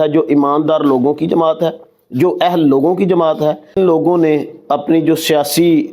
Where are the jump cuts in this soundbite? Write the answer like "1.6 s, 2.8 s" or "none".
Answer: 3.7 s